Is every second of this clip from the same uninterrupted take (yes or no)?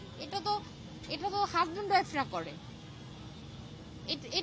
yes